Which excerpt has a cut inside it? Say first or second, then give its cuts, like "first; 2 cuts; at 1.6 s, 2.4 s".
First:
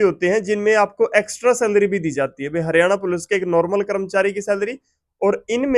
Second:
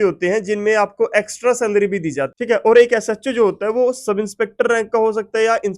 second; 1 cut; at 2.3 s